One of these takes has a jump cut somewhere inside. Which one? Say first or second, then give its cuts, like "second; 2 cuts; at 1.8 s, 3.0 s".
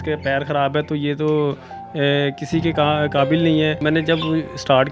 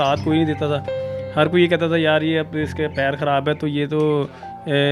first; 1 cut; at 3.8 s